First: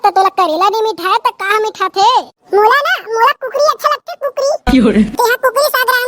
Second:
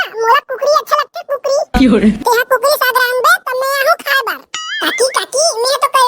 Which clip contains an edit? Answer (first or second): second